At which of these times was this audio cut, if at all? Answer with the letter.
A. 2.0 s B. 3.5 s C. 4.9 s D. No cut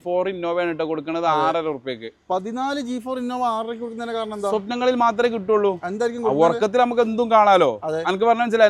D